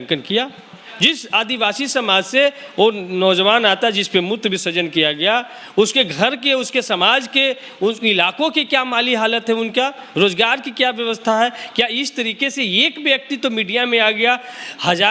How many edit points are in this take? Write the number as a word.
zero